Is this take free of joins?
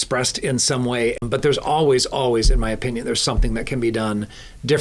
no; 1 cut; at 1.2 s

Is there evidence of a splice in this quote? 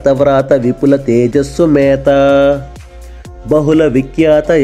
no; 0 cuts

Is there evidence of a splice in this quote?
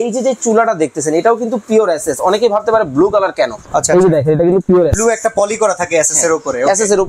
no; 0 cuts

